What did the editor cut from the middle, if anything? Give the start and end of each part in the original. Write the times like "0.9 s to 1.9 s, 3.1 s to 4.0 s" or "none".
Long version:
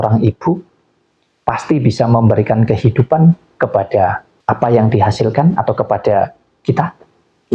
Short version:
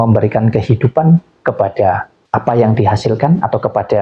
none